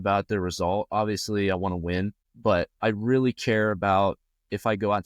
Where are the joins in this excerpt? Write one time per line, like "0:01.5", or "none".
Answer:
0:02.2